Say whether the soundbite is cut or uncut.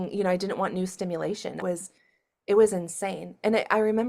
cut